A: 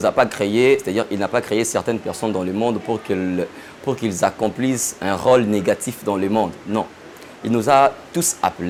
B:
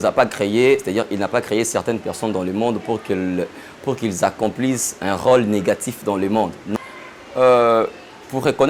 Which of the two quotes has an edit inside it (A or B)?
B